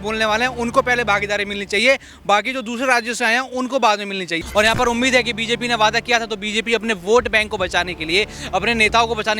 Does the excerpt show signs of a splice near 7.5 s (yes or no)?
no